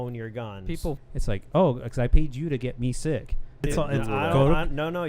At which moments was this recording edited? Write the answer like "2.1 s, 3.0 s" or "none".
1.0 s, 3.6 s